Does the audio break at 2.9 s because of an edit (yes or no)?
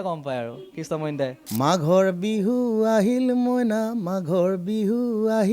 no